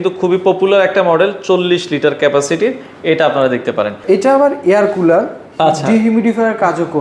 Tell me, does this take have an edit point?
yes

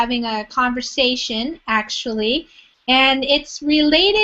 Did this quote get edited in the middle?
no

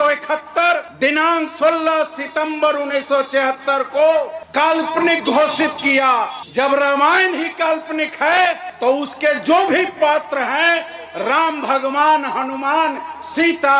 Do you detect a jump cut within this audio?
no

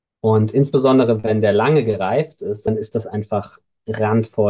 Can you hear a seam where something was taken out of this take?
yes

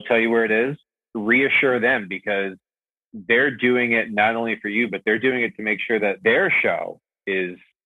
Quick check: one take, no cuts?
no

